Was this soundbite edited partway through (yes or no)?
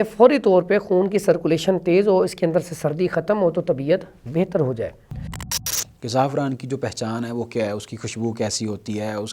yes